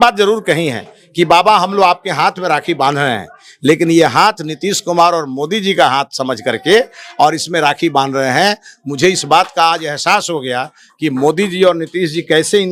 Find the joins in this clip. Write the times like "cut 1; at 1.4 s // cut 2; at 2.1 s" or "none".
none